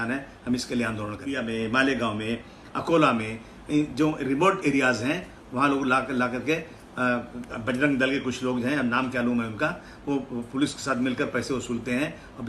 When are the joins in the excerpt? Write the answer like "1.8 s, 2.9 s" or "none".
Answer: 1.3 s